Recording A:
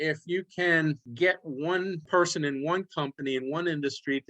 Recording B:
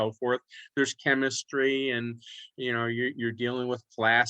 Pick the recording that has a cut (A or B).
A